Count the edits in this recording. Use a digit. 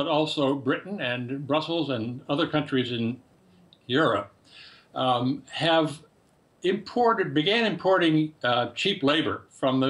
1